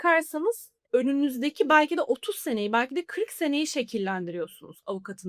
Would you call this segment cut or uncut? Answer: uncut